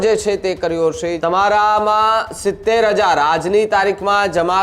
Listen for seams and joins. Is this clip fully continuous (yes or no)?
no